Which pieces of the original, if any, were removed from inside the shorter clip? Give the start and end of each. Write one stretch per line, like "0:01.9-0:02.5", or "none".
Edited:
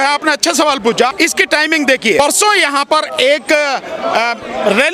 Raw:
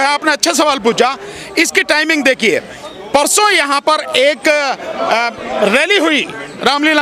0:01.1-0:01.5
0:02.6-0:03.1